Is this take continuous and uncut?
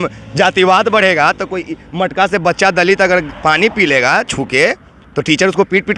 yes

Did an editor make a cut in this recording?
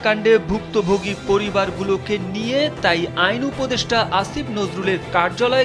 no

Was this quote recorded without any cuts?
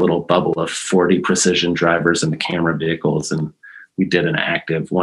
yes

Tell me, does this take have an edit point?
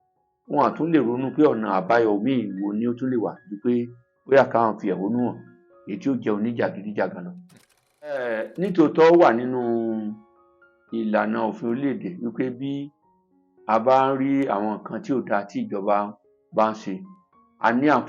yes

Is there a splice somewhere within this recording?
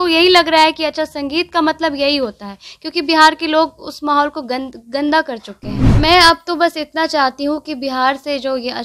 yes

